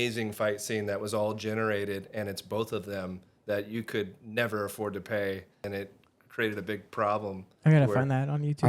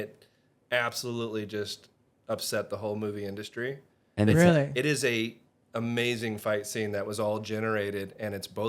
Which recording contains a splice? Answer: first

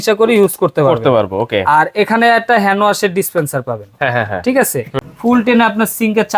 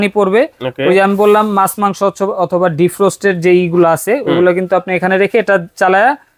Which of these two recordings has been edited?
first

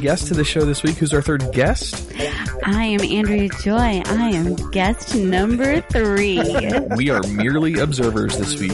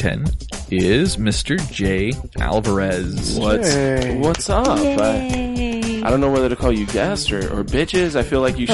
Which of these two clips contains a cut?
second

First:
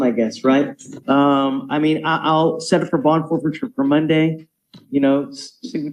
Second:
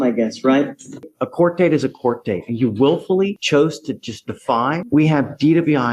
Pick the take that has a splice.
second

